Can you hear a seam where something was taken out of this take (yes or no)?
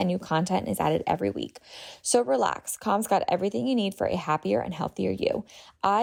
no